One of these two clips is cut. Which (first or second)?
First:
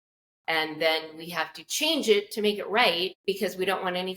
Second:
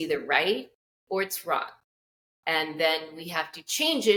first